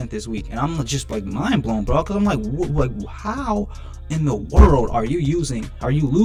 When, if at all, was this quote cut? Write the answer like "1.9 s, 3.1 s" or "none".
none